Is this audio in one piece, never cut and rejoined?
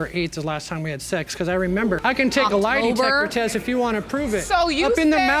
yes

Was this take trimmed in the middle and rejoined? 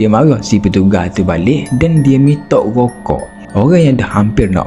yes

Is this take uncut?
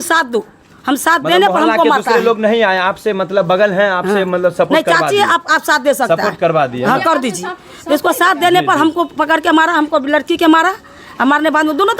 yes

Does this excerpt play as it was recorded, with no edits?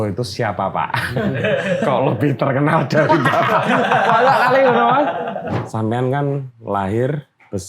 no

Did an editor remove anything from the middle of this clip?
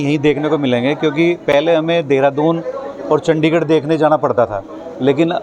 no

